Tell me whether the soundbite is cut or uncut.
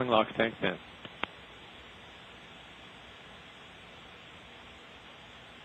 uncut